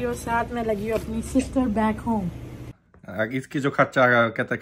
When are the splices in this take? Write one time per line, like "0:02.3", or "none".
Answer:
0:02.8